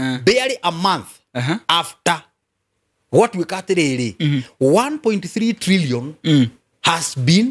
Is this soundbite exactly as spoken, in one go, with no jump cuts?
yes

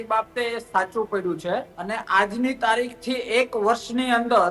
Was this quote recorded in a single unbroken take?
no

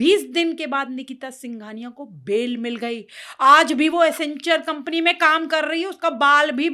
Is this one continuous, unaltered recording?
yes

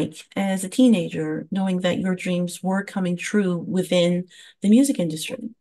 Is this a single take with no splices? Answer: yes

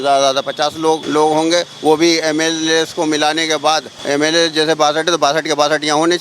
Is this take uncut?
no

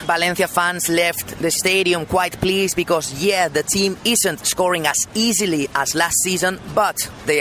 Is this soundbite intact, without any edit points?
yes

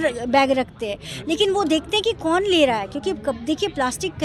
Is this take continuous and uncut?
yes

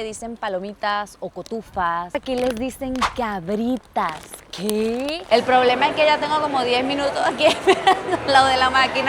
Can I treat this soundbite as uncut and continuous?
no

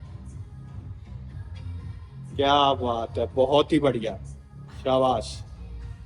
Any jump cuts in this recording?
no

